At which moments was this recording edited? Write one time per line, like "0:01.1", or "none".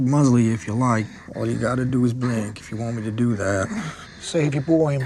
none